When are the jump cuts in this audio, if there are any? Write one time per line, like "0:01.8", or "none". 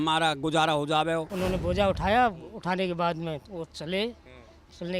0:01.3